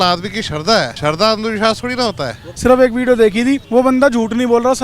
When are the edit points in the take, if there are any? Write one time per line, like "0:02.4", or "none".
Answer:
0:00.9
0:02.5
0:03.6